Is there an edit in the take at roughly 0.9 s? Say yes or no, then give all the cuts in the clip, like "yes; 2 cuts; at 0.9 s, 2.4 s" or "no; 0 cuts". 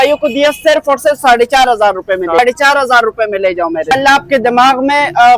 no; 2 cuts; at 2.4 s, 3.9 s